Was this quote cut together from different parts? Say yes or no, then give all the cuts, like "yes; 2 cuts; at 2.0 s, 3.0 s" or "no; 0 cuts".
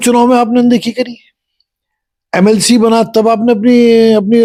no; 0 cuts